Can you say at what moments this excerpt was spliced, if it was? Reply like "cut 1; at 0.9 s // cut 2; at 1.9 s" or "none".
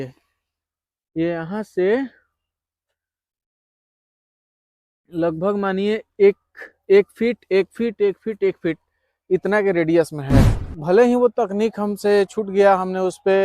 cut 1; at 10.7 s

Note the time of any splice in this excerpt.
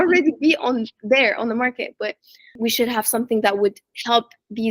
cut 1; at 2.6 s

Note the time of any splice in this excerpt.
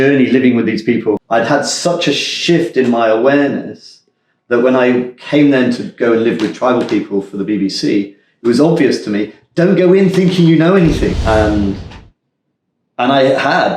cut 1; at 1.2 s // cut 2; at 11.2 s

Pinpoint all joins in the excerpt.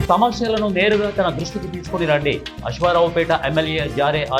none

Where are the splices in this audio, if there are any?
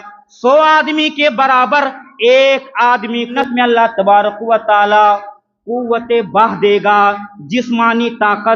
cut 1; at 3.3 s

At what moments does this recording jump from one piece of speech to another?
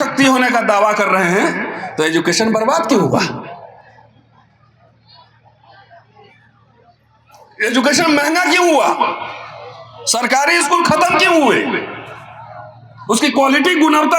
none

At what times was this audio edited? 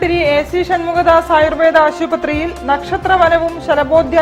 none

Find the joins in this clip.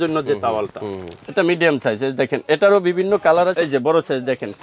cut 1; at 1.2 s // cut 2; at 3.5 s

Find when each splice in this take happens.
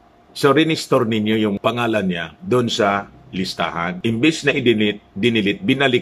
cut 1; at 1.6 s // cut 2; at 3.9 s

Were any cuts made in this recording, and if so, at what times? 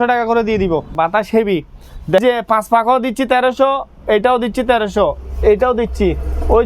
cut 1; at 0.9 s // cut 2; at 2.2 s

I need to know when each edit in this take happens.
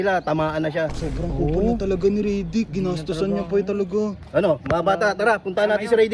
cut 1; at 0.9 s

